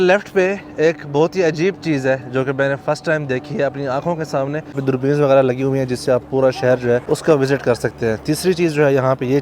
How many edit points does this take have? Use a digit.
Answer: 2